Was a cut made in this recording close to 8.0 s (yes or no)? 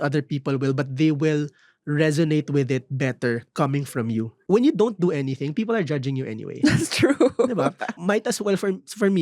yes